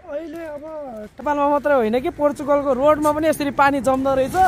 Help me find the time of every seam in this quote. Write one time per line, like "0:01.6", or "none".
0:01.4